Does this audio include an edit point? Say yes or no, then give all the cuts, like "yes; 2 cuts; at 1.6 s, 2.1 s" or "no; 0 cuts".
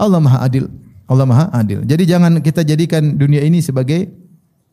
no; 0 cuts